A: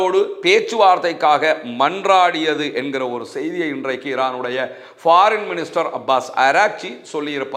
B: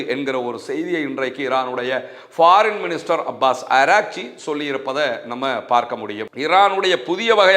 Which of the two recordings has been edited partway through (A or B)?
B